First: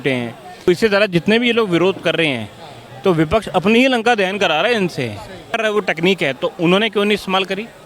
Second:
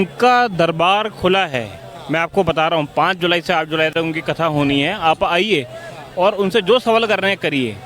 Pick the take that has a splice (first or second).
first